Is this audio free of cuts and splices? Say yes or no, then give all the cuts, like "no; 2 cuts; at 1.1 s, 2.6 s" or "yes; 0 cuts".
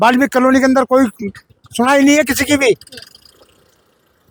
yes; 0 cuts